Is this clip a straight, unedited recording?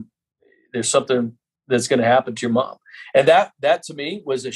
yes; 0 cuts

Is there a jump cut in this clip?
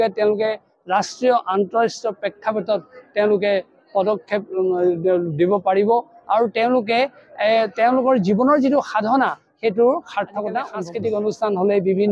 yes; 1 cut; at 10.8 s

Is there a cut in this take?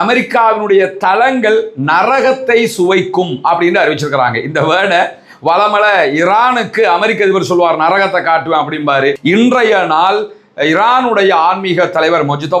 yes; 1 cut; at 9.1 s

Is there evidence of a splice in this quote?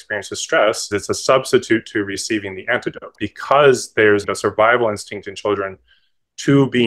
yes; 3 cuts; at 0.8 s, 3.1 s, 4.3 s

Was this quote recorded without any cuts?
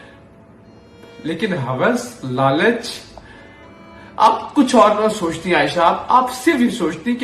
yes; 0 cuts

